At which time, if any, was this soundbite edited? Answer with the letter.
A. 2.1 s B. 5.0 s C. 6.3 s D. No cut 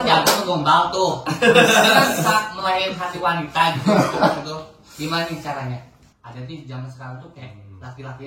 C